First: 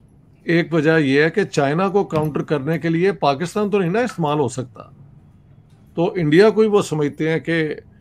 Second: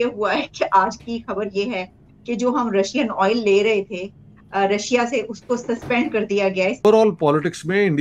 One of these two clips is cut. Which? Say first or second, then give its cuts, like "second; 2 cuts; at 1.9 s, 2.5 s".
second; 1 cut; at 6.7 s